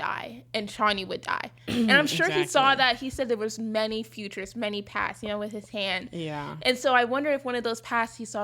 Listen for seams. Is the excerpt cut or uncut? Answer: uncut